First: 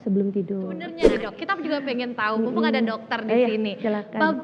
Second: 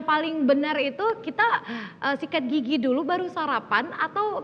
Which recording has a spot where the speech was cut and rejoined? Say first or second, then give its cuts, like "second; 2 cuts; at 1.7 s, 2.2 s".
first; 1 cut; at 1.0 s